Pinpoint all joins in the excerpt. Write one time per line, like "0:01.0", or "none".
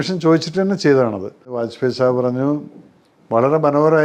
0:01.7